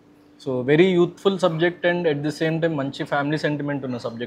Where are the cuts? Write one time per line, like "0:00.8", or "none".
none